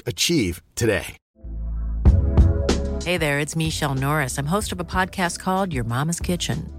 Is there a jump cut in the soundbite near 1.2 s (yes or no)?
yes